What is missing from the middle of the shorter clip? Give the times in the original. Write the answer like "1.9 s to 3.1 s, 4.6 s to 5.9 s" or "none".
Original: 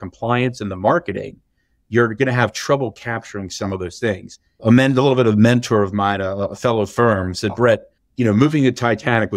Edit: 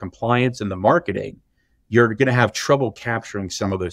none